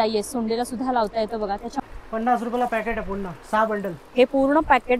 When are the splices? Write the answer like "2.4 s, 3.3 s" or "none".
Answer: 1.8 s